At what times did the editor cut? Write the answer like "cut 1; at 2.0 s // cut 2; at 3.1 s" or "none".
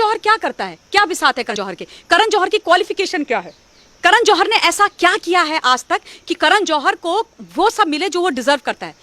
cut 1; at 1.5 s